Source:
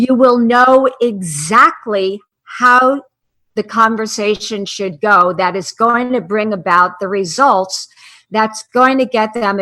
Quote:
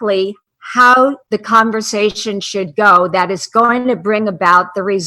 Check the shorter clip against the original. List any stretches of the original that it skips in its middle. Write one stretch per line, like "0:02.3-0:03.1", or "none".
0:03.1-0:03.5